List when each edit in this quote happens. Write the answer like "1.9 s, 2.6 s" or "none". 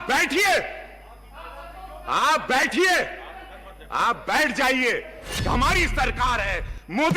5.2 s